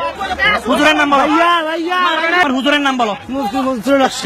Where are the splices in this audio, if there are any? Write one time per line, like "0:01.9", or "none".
0:02.4

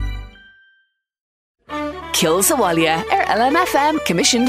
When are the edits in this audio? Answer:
0:01.2

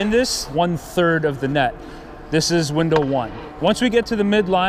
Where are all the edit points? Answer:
0:03.4

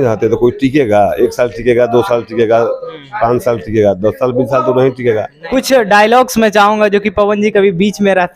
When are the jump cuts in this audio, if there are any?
0:05.4

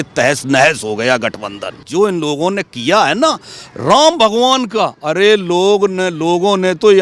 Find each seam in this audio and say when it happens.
0:01.9

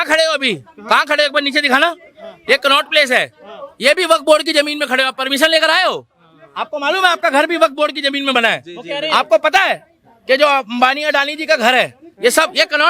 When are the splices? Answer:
none

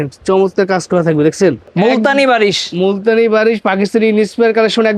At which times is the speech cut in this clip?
0:01.7

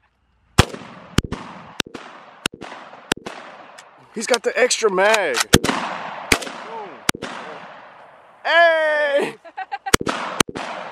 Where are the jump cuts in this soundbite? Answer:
0:04.1
0:05.4

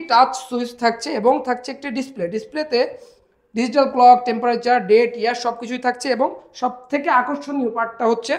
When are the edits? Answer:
none

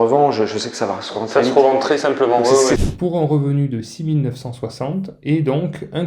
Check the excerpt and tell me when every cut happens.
0:02.8

